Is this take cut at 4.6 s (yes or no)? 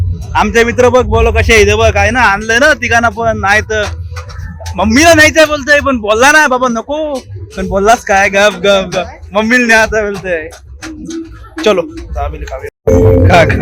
no